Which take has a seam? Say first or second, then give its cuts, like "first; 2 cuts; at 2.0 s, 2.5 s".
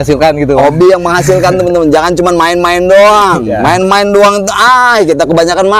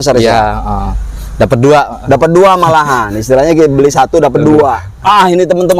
second; 1 cut; at 4.9 s